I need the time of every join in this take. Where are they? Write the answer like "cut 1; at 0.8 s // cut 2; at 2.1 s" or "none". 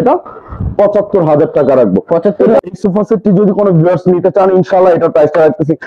cut 1; at 2.6 s

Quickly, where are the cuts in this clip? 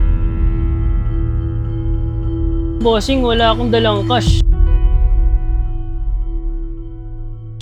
none

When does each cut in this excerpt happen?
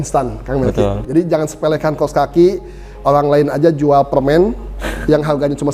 cut 1; at 1.0 s

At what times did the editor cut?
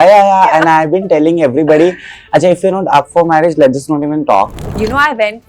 cut 1; at 4.6 s

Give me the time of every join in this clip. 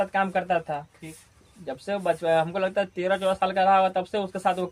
none

